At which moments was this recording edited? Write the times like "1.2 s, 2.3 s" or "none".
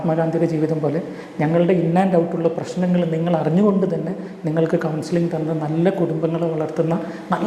none